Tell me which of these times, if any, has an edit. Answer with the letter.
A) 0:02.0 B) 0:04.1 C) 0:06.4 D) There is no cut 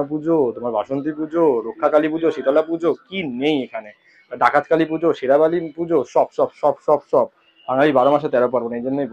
D